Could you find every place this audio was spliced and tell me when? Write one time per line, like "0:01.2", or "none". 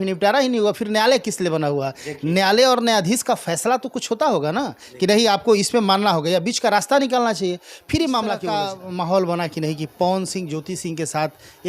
0:08.4

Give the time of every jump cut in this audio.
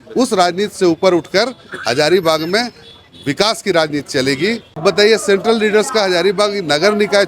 0:04.8

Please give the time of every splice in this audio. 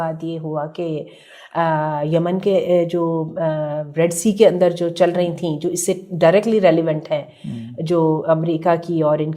none

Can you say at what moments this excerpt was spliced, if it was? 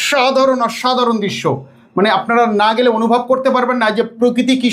none

